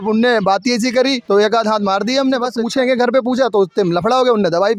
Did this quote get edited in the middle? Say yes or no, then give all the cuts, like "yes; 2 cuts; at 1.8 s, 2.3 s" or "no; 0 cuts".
yes; 2 cuts; at 1.2 s, 2.6 s